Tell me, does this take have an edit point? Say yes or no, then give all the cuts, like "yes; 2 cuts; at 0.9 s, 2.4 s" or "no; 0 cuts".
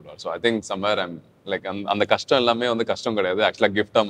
no; 0 cuts